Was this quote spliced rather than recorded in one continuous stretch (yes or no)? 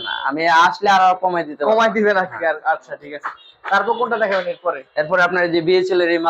no